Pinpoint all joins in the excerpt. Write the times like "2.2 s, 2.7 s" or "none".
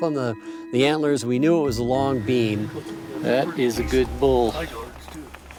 none